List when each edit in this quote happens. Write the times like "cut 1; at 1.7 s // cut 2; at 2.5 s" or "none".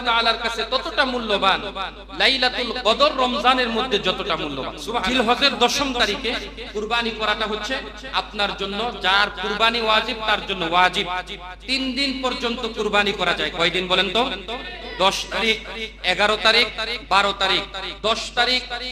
cut 1; at 5.1 s